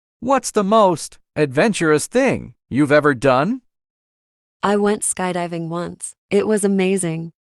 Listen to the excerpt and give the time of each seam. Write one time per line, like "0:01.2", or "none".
0:01.1